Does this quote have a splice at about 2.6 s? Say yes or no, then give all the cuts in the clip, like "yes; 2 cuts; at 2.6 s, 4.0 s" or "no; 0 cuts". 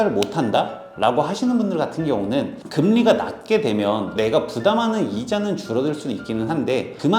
yes; 1 cut; at 2.6 s